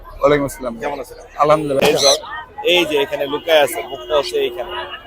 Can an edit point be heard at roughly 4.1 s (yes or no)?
no